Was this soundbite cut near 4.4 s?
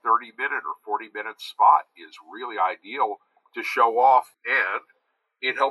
yes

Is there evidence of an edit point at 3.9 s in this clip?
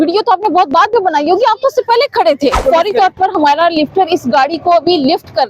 no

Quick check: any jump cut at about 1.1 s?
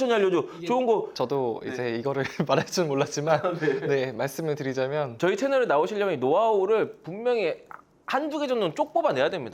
yes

